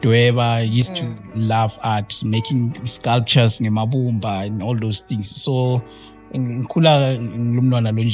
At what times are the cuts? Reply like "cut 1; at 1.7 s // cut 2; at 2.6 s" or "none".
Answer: none